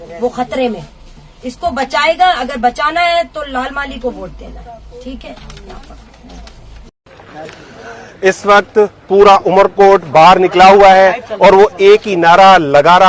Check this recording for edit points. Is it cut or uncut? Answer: cut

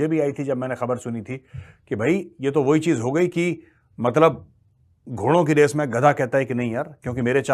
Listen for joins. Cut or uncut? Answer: uncut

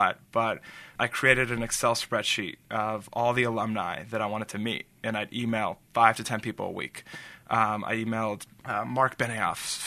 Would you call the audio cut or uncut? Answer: cut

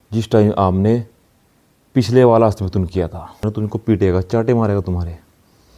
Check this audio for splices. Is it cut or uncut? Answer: cut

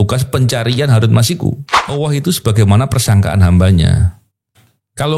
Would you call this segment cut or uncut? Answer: cut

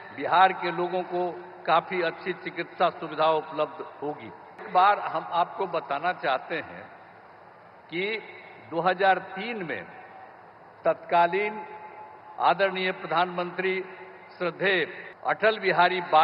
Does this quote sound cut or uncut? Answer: cut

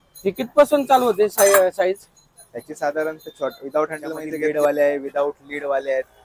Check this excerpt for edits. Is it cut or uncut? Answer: cut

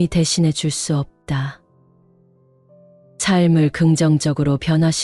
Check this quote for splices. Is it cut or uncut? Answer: cut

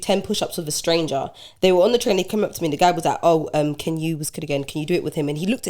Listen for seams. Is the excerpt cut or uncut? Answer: uncut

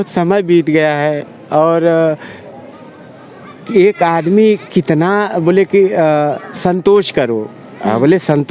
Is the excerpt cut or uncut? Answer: uncut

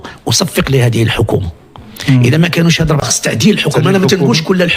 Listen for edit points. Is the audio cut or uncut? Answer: cut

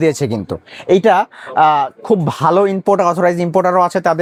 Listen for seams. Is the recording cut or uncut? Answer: uncut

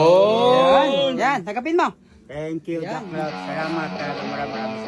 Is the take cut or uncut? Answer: uncut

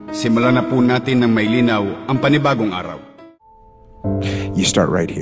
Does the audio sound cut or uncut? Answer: cut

